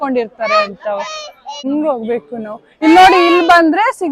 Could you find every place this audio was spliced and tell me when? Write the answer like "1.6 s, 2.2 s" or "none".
1.6 s